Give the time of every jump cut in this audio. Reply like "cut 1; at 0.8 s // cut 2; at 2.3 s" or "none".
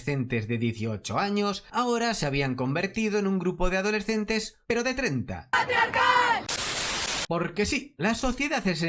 cut 1; at 6.8 s